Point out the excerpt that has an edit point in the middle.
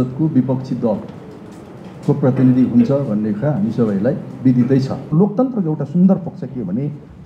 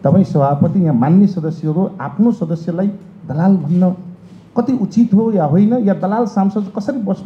first; 1 cut; at 5.1 s

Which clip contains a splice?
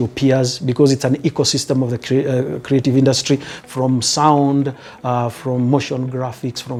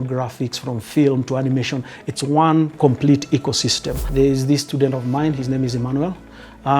second; 1 cut; at 4.1 s

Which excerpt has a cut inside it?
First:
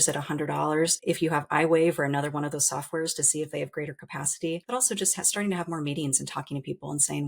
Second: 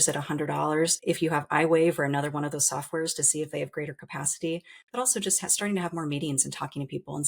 first; 1 cut; at 4.6 s

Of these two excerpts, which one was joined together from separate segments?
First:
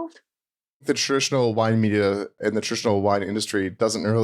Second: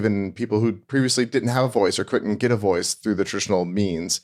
first; 2 cuts; at 0.8 s, 2.3 s

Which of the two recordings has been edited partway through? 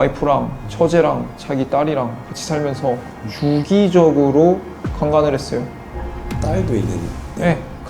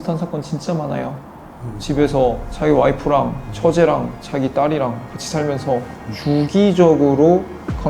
second; 1 cut; at 1.7 s

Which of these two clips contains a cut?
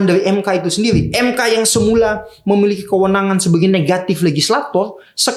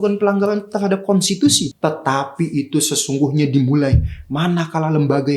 second; 1 cut; at 1.7 s

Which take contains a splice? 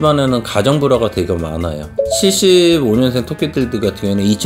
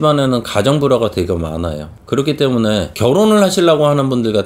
first; 1 cut; at 2.0 s

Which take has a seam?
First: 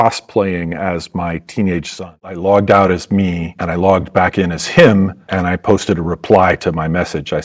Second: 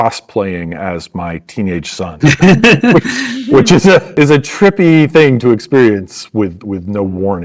first; 1 cut; at 2.1 s

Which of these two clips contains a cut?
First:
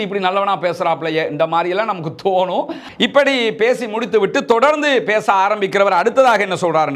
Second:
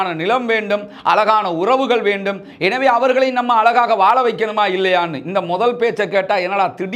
first; 1 cut; at 2.8 s

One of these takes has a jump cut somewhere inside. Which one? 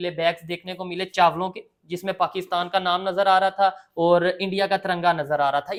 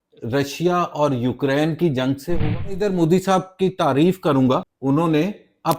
second; 2 cuts; at 2.8 s, 4.7 s

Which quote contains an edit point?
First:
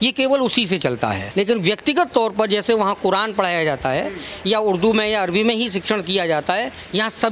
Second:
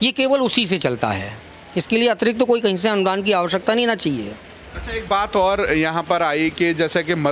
first; 1 cut; at 1.2 s

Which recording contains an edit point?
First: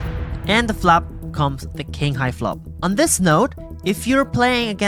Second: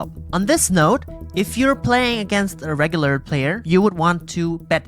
second; 1 cut; at 3.6 s

